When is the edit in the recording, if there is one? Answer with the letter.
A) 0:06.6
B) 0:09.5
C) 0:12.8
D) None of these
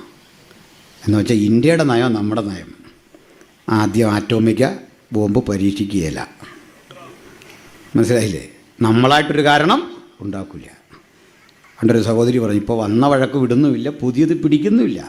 D